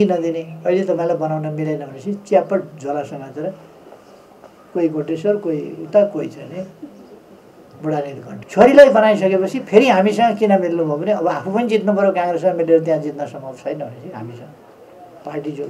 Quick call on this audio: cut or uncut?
cut